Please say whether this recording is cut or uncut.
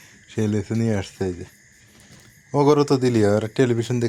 uncut